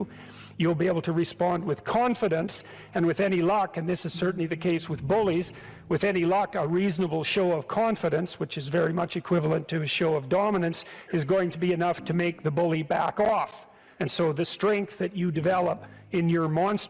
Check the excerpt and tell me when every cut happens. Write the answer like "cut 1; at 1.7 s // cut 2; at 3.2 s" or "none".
cut 1; at 13.2 s // cut 2; at 15.9 s